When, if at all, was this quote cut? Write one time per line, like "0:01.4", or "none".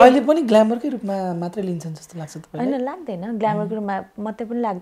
none